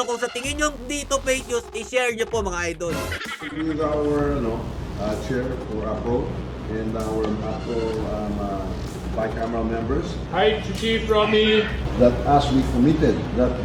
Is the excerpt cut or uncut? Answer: cut